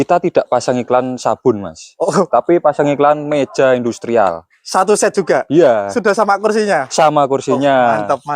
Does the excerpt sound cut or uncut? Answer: uncut